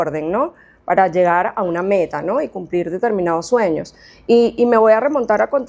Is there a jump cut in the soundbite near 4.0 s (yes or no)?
no